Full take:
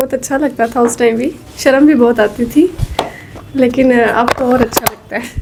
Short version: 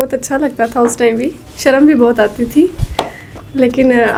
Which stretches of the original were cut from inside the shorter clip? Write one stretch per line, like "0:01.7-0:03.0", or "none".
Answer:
none